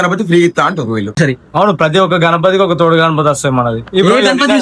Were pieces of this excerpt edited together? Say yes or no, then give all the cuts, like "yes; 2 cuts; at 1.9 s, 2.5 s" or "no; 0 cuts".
yes; 1 cut; at 1.2 s